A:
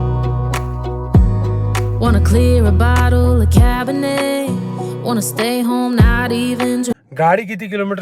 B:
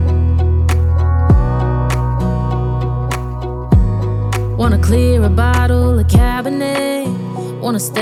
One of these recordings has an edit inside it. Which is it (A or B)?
A